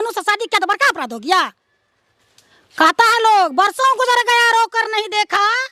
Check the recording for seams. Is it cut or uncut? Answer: uncut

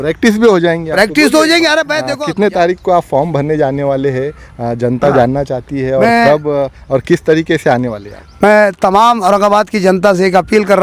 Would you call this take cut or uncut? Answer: cut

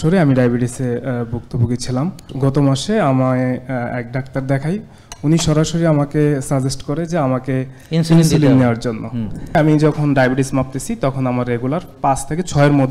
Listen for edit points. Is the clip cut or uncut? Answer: cut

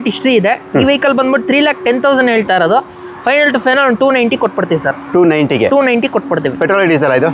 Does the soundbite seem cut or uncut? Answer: uncut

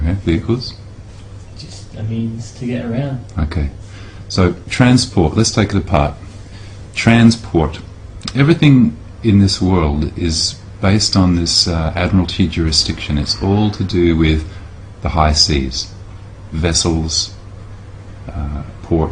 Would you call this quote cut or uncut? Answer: uncut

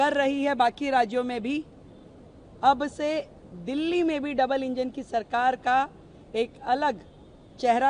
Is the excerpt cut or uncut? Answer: uncut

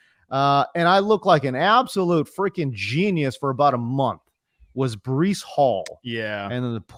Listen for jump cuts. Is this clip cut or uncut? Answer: uncut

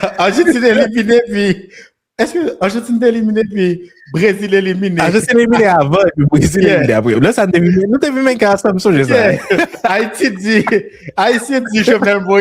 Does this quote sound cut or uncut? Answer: uncut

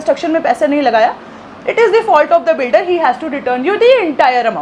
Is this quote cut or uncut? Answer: uncut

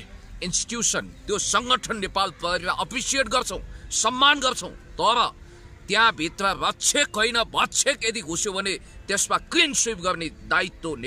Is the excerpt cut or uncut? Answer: uncut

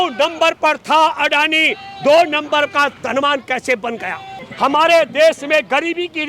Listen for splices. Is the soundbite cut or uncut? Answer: cut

